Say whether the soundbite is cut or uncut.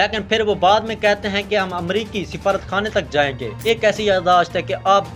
cut